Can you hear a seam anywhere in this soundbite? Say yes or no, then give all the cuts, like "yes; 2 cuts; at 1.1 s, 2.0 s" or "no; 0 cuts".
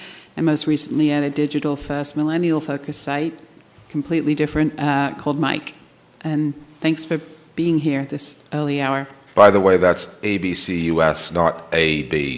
no; 0 cuts